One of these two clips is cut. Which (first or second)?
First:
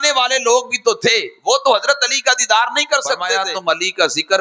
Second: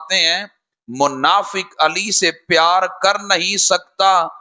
first